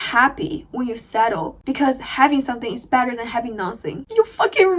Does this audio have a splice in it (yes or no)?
no